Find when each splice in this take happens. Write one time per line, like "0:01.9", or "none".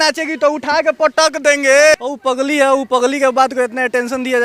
0:02.0